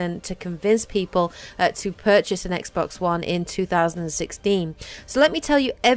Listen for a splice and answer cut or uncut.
uncut